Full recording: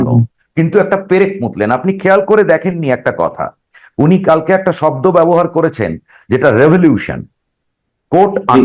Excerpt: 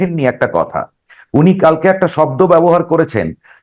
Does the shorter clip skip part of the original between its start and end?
no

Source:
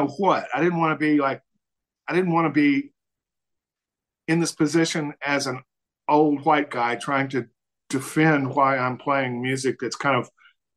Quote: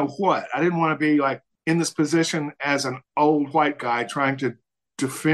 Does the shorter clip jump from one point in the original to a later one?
yes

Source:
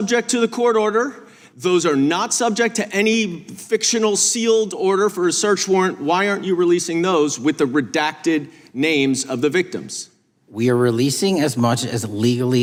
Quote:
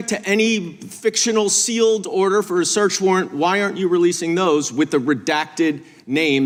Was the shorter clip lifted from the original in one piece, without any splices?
yes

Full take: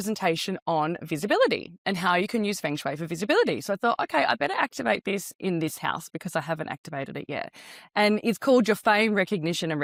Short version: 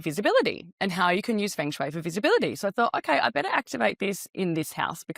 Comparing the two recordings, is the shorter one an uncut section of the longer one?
yes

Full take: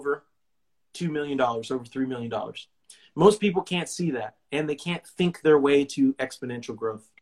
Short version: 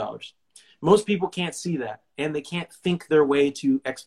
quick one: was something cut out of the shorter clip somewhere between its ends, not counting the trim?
no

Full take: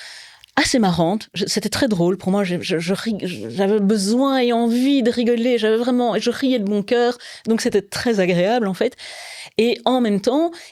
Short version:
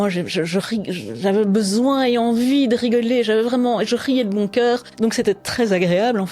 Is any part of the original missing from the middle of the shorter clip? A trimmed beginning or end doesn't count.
yes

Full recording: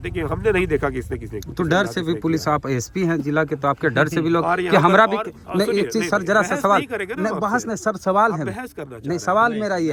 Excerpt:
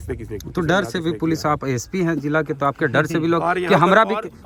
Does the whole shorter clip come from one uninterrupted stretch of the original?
yes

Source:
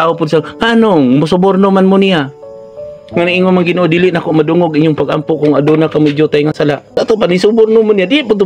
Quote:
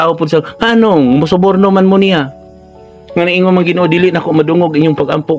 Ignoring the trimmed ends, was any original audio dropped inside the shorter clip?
no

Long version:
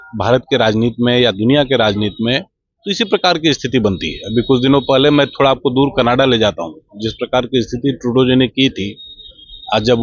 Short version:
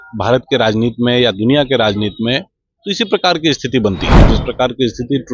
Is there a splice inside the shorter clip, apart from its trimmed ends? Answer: yes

